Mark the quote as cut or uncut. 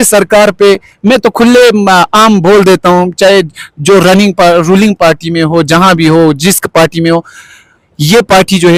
uncut